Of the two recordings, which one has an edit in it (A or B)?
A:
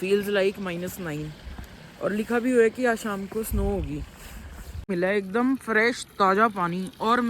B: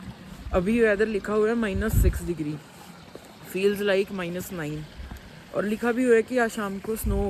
A